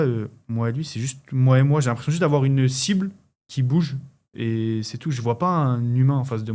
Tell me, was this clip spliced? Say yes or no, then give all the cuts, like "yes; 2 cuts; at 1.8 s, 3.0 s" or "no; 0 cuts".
no; 0 cuts